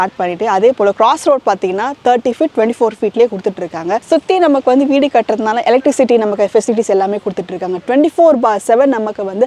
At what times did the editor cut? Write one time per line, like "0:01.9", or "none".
none

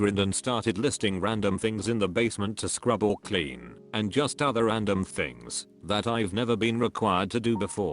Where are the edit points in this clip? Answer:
0:06.4

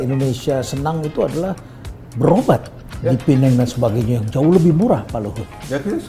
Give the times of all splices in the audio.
none

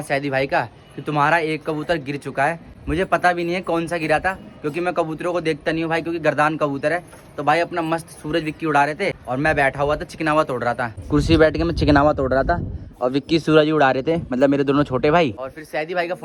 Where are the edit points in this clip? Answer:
none

